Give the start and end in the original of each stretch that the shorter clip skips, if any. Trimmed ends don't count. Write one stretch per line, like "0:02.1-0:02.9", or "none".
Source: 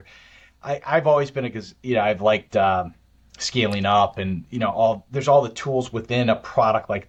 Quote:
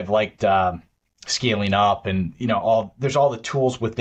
none